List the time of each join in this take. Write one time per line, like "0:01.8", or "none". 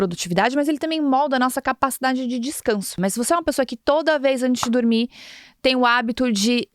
0:02.9